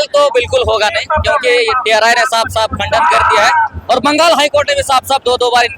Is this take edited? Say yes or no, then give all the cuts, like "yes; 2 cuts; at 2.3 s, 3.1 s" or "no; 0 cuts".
no; 0 cuts